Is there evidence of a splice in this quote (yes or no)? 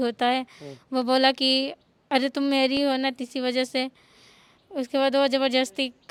no